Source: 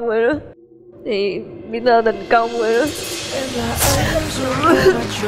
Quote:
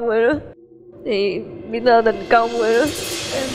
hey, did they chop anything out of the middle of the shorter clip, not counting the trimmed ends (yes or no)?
no